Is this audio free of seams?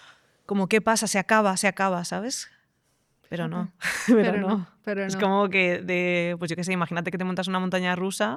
yes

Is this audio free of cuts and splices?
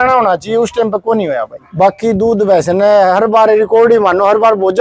no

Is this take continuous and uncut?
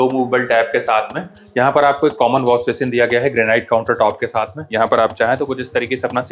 no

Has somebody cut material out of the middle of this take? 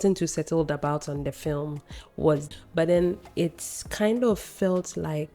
yes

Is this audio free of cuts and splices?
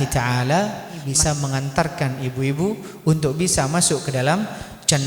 no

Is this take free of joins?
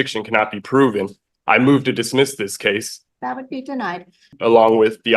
no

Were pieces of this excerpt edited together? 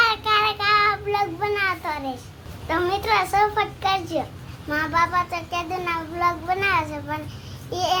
no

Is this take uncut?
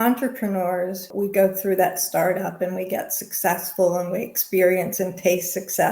no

